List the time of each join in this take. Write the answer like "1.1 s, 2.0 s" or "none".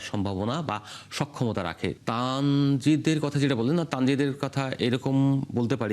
2.0 s

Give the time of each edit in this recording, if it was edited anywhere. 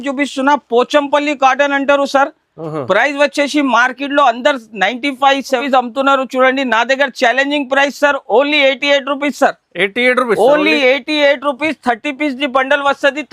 5.6 s

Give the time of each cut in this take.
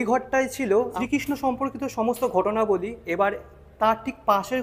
0.9 s

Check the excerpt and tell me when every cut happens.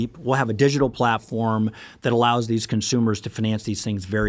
none

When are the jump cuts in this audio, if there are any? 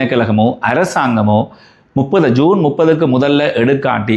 none

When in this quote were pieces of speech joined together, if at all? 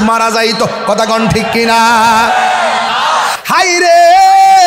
2.9 s

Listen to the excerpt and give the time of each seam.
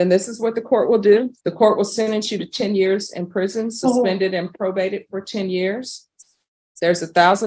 1.4 s

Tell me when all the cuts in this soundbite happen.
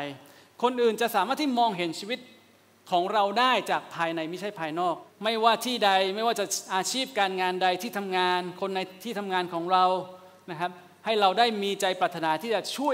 5.1 s

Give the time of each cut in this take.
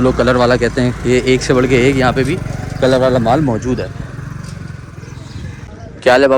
none

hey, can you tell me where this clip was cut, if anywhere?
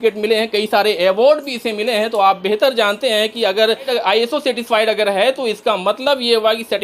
none

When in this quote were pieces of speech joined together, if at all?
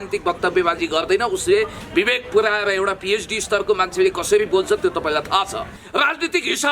5.8 s

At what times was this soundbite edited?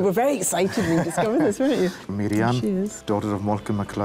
2.0 s, 3.0 s

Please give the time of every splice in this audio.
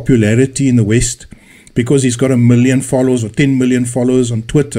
3.4 s

